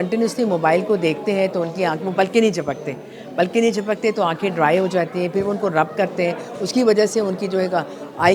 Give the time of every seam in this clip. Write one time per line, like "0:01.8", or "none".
none